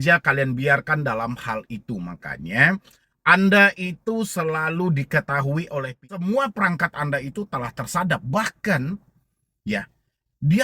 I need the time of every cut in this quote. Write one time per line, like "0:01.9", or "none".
0:05.9